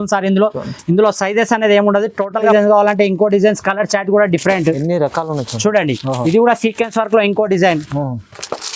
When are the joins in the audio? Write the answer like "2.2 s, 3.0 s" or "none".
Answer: 2.5 s